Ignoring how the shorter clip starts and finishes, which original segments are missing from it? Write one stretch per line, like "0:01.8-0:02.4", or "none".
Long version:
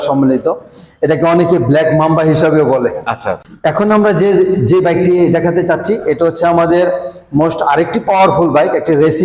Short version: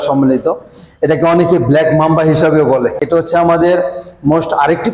0:03.0-0:06.1